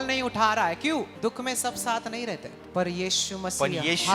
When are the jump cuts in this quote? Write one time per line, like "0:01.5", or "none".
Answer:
0:01.1
0:02.6